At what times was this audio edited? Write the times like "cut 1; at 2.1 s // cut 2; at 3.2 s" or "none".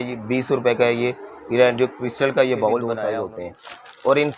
cut 1; at 2.9 s